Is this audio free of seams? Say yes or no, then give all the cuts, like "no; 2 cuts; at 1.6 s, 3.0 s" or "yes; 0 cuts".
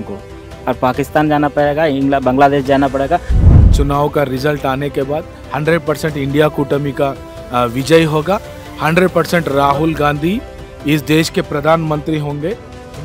no; 1 cut; at 3.4 s